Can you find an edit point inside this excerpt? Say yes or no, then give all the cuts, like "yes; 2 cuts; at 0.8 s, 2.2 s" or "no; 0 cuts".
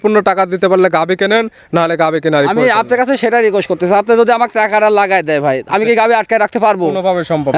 no; 0 cuts